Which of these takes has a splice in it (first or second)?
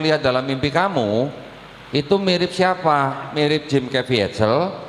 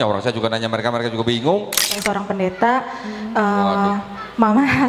second